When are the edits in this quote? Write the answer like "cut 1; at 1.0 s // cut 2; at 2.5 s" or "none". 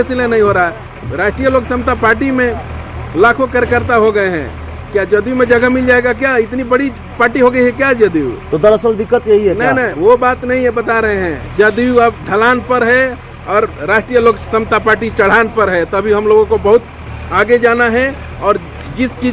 none